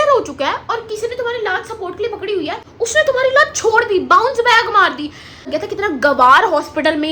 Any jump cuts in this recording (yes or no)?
yes